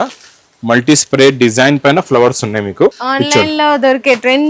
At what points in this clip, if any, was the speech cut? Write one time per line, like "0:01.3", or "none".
0:03.0